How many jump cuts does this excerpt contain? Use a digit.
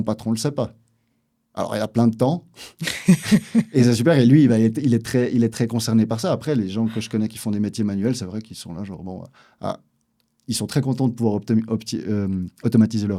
0